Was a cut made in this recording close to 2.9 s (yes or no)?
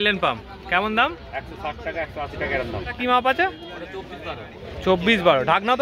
yes